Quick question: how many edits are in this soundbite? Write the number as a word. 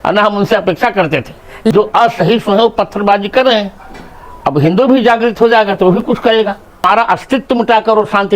two